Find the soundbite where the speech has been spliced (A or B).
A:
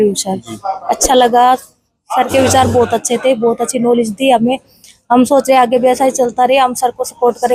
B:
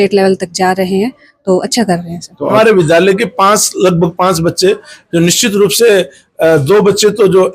B